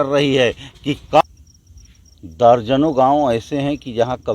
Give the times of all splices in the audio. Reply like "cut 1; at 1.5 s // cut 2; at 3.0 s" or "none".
cut 1; at 1.2 s